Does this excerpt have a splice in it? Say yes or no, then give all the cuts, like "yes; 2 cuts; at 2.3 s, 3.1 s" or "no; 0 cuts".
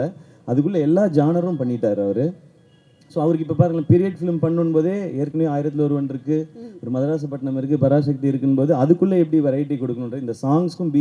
no; 0 cuts